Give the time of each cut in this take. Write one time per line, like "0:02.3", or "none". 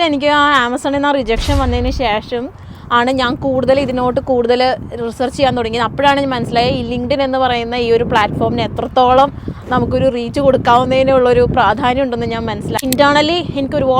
0:12.8

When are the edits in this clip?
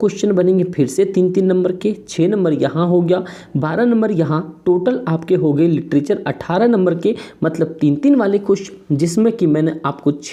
none

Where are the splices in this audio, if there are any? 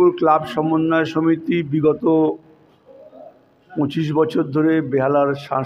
none

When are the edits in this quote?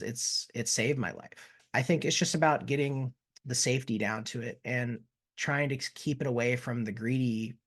0:01.6

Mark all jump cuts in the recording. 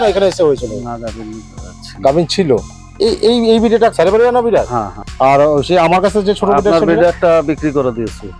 0:02.8
0:03.9
0:05.0

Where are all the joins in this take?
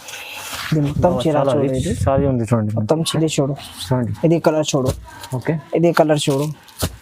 0:03.1

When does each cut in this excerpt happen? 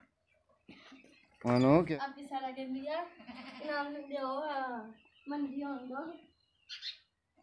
0:01.9

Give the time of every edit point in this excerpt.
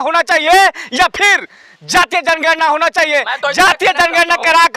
none

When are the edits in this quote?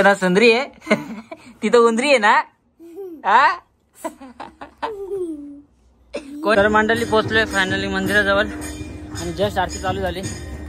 0:06.6

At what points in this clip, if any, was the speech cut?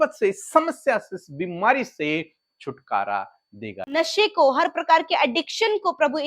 0:04.0

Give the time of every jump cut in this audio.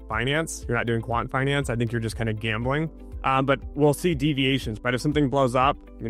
0:03.0
0:04.7

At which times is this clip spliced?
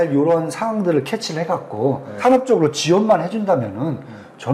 0:02.2

